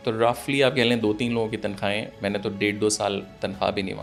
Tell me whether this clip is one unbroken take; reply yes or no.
yes